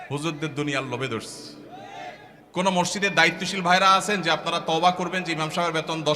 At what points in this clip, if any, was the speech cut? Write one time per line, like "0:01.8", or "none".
0:02.3